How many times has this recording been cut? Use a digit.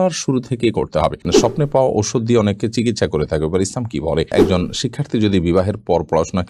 2